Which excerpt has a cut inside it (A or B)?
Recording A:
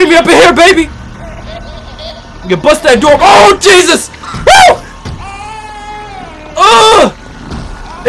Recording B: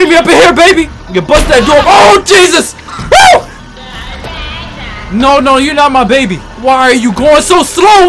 B